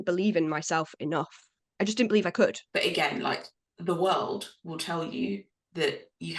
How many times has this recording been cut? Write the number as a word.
one